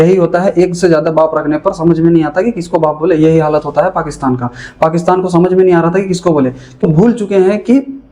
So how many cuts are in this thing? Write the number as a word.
one